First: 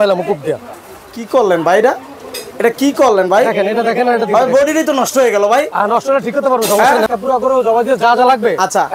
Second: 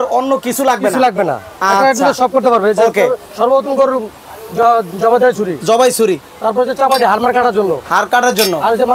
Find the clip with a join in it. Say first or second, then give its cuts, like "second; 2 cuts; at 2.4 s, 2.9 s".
first; 1 cut; at 7.1 s